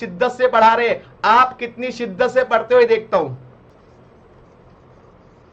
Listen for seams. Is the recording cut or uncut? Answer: cut